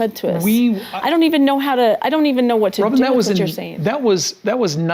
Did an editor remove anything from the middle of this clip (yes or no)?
no